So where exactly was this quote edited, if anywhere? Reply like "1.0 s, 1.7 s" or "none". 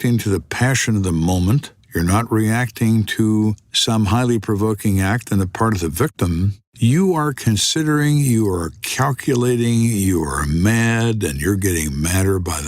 3.7 s, 6.6 s